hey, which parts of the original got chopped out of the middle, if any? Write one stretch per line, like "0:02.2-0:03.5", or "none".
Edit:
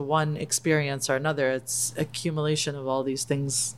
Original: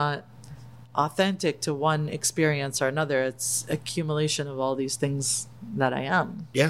none